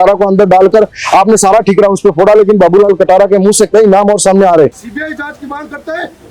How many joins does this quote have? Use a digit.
1